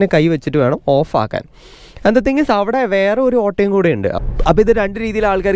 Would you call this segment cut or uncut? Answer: cut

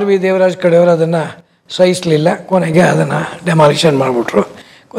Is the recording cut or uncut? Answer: uncut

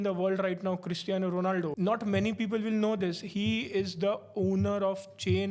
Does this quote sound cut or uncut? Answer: cut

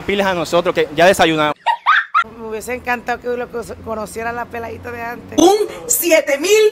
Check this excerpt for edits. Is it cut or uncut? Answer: cut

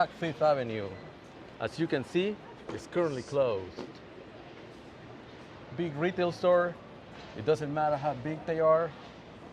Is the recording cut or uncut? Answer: uncut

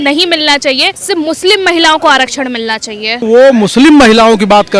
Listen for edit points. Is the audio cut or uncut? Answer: cut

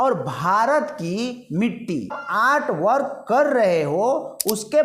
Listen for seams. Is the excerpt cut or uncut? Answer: cut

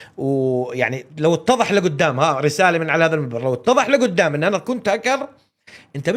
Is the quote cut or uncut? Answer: uncut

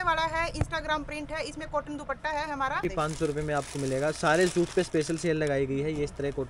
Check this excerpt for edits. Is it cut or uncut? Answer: cut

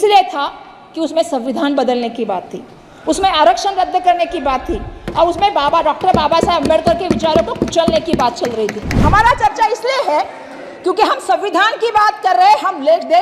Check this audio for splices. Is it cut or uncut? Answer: cut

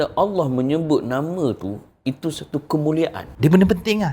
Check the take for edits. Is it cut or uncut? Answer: cut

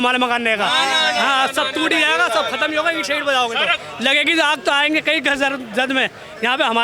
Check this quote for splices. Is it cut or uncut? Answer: cut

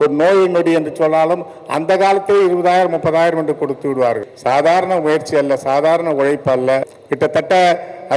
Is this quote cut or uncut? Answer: cut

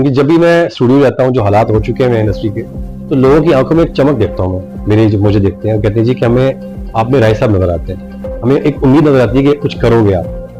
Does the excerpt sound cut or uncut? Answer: uncut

